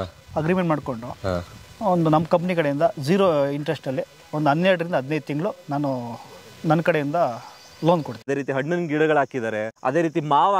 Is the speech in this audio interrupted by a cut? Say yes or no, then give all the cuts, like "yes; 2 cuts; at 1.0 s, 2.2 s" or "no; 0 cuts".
yes; 2 cuts; at 8.3 s, 9.7 s